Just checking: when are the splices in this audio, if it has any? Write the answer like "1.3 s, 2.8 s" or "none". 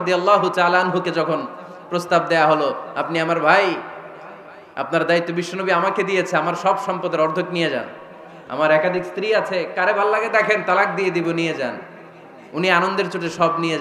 none

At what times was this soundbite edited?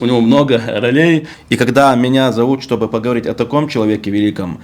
1.4 s

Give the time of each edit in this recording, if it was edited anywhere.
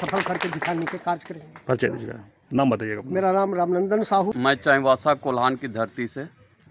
none

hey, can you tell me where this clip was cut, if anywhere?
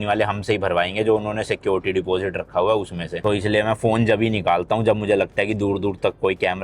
none

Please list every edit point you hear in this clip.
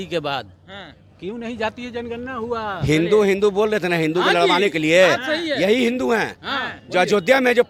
none

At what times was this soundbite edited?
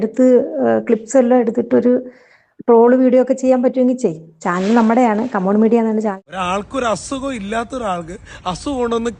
6.1 s

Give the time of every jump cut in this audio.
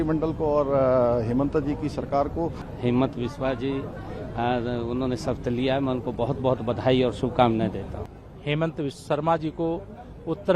2.6 s, 8.0 s

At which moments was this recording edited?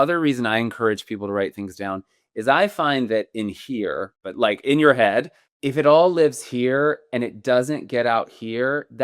4.2 s, 5.4 s

